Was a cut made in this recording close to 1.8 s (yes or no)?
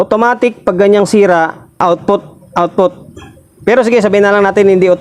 yes